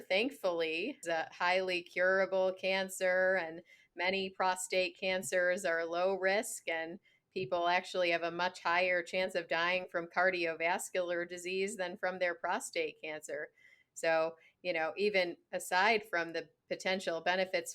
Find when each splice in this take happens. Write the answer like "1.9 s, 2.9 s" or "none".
1.0 s